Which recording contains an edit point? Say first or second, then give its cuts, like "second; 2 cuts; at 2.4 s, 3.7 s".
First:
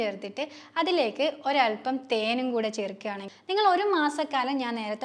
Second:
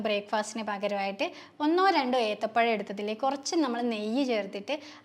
first; 1 cut; at 3.2 s